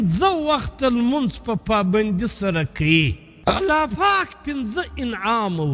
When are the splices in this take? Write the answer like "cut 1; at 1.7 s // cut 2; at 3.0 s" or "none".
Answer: cut 1; at 3.2 s